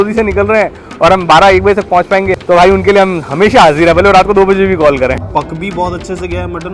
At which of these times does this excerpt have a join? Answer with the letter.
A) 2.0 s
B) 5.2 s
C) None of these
B